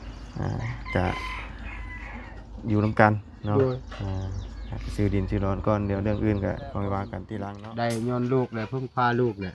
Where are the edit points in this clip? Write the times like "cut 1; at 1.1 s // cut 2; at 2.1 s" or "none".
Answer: cut 1; at 7.2 s